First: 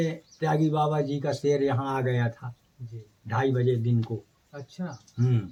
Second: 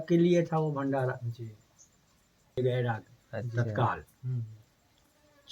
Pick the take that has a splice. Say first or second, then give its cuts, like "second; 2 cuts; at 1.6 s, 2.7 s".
second; 1 cut; at 2.6 s